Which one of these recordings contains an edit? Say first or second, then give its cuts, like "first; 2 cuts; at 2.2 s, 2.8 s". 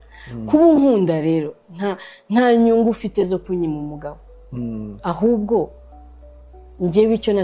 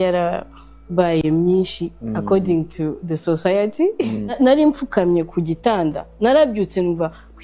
second; 1 cut; at 4.3 s